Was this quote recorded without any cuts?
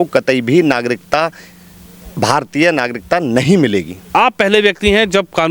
no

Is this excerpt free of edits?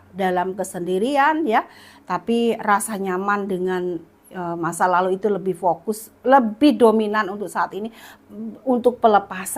yes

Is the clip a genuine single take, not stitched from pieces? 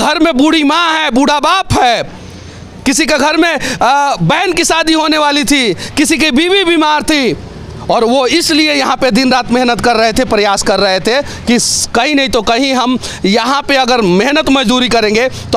yes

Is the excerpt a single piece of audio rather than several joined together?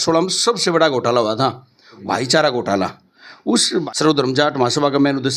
no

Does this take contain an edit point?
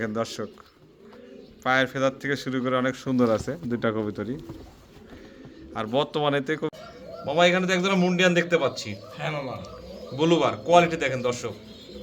yes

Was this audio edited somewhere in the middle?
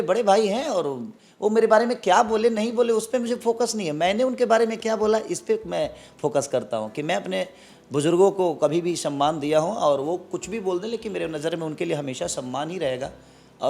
no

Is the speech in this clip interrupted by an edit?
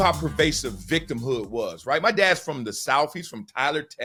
no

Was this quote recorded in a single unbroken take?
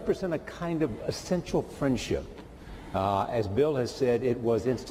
yes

